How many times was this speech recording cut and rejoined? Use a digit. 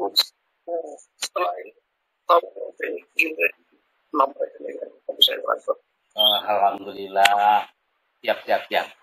0